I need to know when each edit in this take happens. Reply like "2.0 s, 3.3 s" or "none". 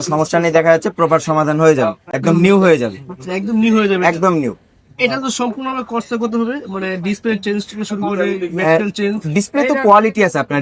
none